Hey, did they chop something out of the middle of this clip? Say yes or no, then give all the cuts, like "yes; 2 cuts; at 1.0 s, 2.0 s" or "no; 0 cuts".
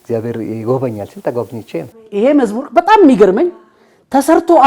yes; 1 cut; at 2.0 s